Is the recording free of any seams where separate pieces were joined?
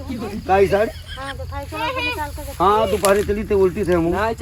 yes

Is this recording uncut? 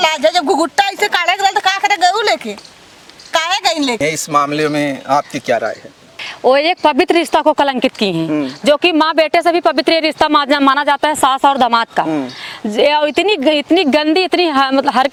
yes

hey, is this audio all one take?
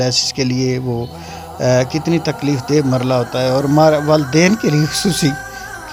yes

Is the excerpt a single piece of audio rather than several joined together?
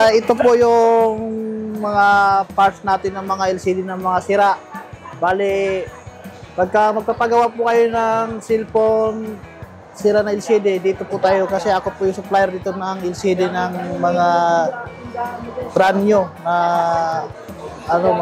yes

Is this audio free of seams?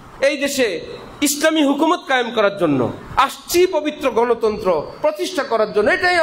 yes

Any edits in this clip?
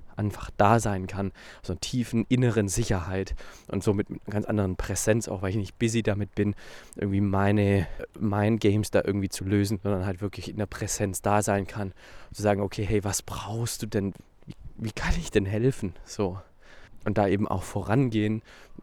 yes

